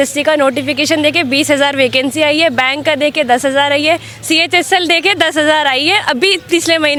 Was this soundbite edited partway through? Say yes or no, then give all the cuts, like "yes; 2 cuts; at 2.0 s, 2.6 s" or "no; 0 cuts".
no; 0 cuts